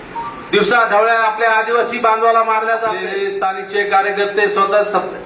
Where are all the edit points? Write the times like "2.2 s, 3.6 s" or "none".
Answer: 3.1 s

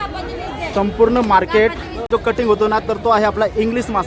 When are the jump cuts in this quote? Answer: 2.0 s

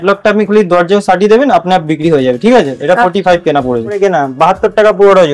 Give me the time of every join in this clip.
4.0 s

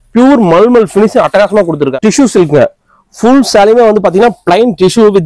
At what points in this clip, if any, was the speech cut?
1.9 s

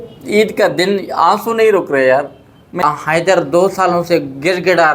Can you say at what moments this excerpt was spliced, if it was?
2.8 s

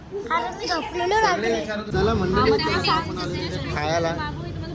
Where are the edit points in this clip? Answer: 1.8 s

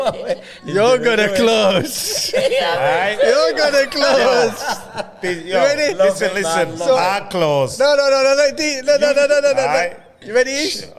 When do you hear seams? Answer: none

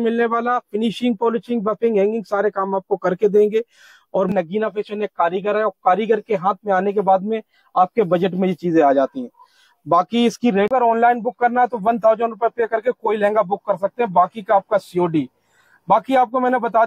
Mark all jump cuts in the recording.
4.3 s, 10.7 s

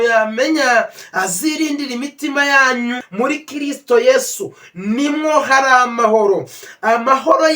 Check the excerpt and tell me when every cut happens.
3.0 s, 6.7 s

